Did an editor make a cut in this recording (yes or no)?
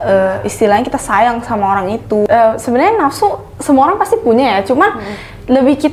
yes